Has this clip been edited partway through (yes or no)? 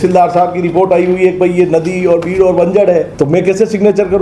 yes